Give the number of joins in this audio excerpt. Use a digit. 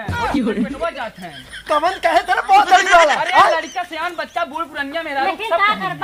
0